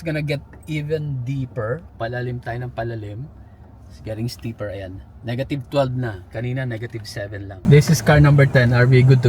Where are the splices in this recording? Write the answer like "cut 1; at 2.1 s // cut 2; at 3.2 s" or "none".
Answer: cut 1; at 1.9 s // cut 2; at 7.6 s